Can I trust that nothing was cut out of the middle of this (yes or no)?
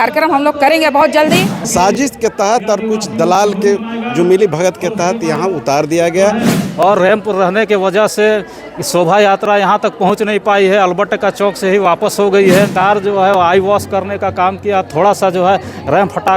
no